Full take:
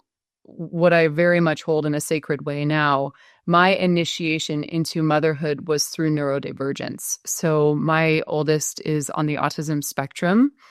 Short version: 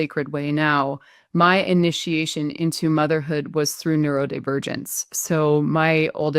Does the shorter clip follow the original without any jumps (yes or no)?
yes